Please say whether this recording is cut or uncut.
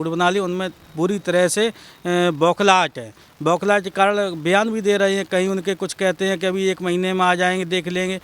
uncut